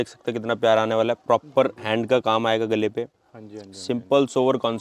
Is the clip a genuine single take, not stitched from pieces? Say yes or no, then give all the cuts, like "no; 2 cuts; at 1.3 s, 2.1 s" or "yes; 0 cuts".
yes; 0 cuts